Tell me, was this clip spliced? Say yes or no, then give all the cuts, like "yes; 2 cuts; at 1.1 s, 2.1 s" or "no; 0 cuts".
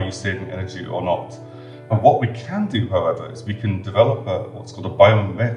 no; 0 cuts